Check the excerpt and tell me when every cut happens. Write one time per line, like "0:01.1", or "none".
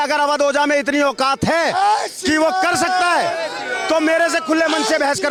none

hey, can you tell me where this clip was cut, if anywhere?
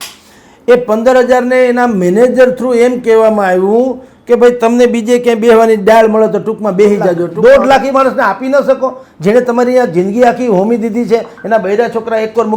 0:07.3

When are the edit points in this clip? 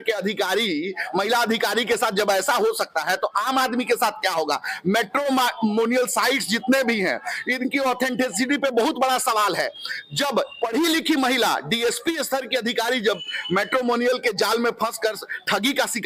none

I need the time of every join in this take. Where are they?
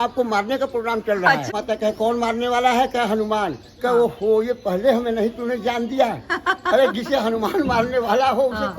0:01.5

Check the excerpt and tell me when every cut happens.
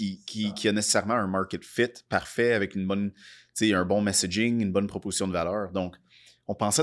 none

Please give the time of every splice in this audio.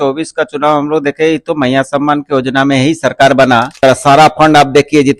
0:03.8

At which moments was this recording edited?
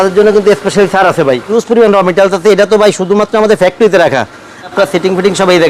0:01.5
0:04.7

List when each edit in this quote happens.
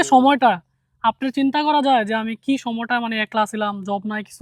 none

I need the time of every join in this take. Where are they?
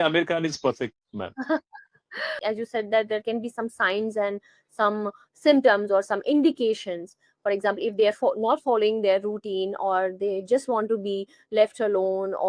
0:02.4

